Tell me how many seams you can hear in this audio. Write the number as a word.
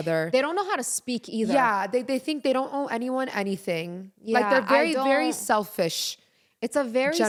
zero